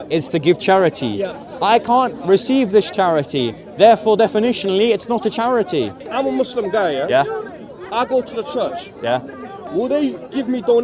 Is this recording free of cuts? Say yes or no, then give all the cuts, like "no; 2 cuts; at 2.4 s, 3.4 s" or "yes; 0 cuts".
no; 2 cuts; at 6.0 s, 9.6 s